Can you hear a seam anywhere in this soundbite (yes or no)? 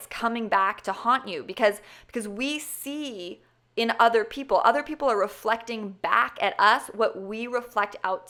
no